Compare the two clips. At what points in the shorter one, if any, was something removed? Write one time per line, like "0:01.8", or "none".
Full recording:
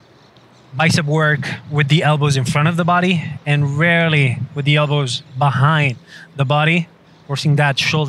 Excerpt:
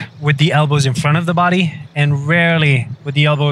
none